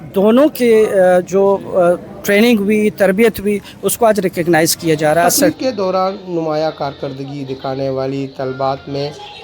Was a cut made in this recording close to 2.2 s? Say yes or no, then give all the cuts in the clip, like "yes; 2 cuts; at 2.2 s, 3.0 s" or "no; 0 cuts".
no; 1 cut; at 5.5 s